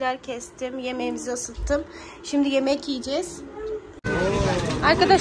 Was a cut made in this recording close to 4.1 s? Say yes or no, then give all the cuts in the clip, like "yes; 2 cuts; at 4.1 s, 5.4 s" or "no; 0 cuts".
yes; 1 cut; at 4.1 s